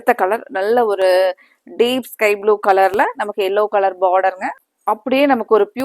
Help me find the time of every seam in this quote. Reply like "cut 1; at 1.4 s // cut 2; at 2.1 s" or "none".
cut 1; at 4.5 s